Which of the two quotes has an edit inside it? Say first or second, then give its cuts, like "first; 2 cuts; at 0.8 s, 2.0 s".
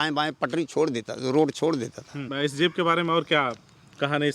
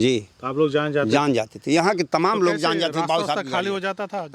first; 1 cut; at 2.2 s